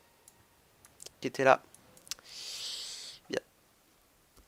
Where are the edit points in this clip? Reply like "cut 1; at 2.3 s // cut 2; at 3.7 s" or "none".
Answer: none